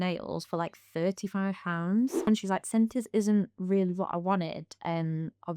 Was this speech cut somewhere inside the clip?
yes; 1 cut; at 2.3 s

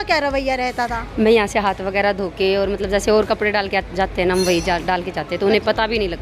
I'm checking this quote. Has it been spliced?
no; 0 cuts

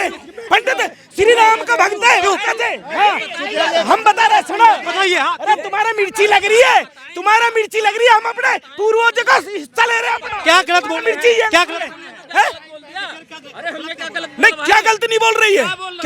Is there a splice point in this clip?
no; 0 cuts

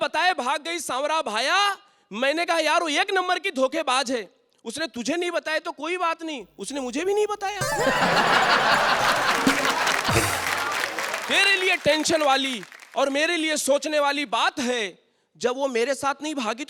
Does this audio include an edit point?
no; 0 cuts

